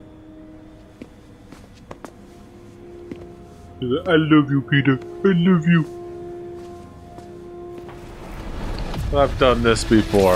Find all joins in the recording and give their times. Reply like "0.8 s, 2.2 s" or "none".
8.2 s